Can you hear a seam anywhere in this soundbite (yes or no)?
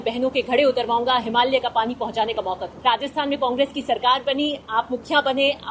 yes